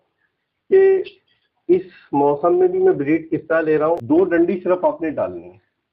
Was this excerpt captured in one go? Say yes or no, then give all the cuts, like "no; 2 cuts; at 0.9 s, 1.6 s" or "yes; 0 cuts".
no; 1 cut; at 4.0 s